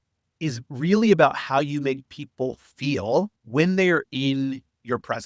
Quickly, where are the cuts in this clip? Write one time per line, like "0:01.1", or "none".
0:03.4